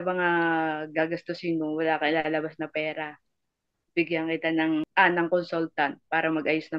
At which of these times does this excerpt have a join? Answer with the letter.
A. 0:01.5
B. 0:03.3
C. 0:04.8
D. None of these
C